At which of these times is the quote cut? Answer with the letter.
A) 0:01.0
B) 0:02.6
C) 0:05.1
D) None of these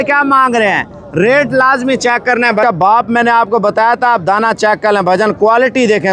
B